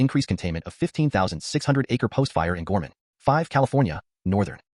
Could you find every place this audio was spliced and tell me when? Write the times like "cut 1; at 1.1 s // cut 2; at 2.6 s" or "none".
cut 1; at 3.0 s